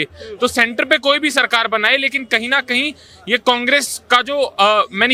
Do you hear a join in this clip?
no; 0 cuts

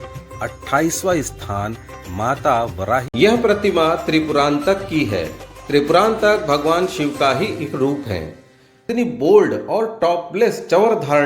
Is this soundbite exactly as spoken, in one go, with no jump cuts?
no; 2 cuts; at 3.1 s, 8.8 s

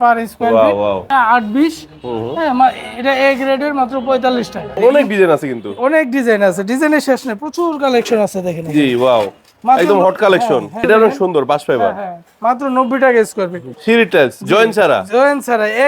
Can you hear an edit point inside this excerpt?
yes; 4 cuts; at 1.0 s, 4.7 s, 10.8 s, 13.7 s

